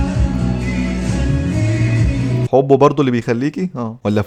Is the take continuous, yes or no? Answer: yes